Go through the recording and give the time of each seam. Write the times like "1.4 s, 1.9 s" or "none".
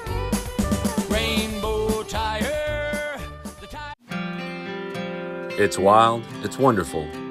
4.0 s

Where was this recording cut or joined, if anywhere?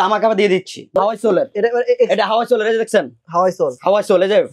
0.9 s

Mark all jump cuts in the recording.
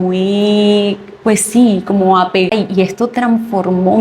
2.5 s

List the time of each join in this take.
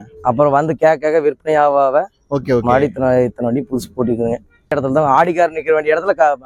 4.7 s

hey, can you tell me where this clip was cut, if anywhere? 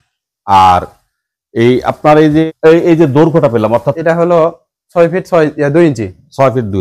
2.4 s, 3.9 s

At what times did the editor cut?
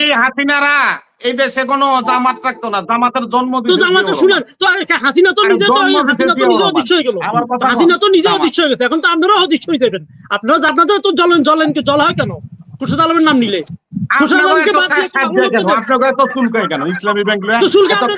10.7 s

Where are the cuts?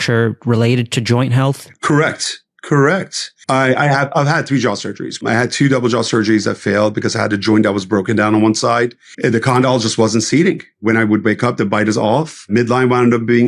1.7 s, 3.5 s, 5.2 s, 9.0 s, 10.8 s, 12.5 s

